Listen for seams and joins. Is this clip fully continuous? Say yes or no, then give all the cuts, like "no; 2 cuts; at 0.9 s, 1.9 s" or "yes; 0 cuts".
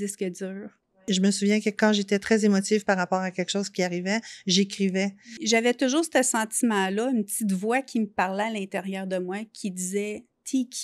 no; 2 cuts; at 1.0 s, 5.3 s